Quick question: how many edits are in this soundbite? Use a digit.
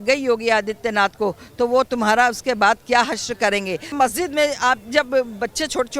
1